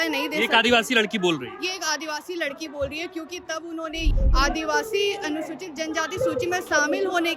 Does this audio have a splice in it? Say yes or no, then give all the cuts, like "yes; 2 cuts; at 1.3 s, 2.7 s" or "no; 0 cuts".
yes; 1 cut; at 4.1 s